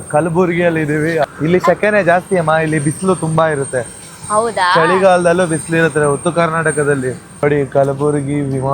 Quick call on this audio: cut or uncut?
cut